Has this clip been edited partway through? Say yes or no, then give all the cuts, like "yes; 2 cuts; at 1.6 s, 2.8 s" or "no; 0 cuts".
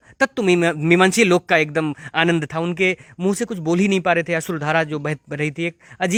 no; 0 cuts